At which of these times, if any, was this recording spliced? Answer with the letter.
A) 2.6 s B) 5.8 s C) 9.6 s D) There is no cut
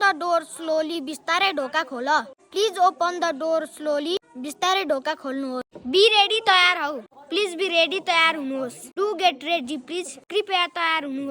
B